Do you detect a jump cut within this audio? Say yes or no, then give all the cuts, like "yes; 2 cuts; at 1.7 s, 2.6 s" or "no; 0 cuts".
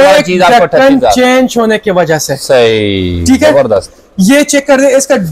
no; 0 cuts